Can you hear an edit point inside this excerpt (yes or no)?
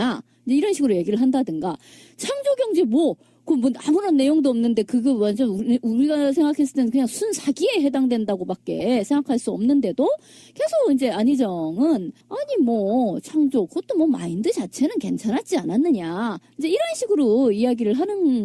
no